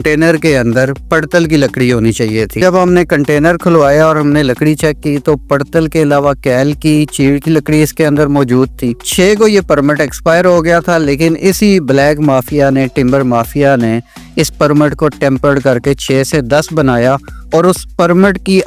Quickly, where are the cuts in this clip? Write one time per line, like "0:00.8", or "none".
0:02.6
0:09.1